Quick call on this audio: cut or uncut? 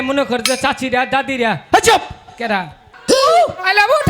cut